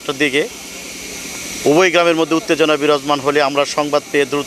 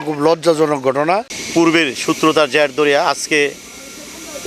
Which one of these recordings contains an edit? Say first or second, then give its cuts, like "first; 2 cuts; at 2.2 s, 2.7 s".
second; 1 cut; at 1.4 s